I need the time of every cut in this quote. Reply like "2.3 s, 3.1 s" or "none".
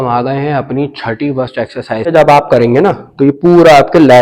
2.1 s